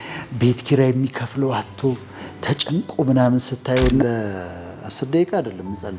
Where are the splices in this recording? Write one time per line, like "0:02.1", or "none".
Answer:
0:04.0